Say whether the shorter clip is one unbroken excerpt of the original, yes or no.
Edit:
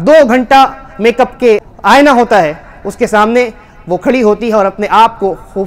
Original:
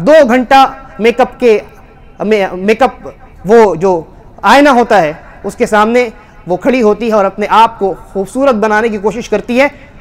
no